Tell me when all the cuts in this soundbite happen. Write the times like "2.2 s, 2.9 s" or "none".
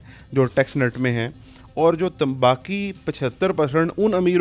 none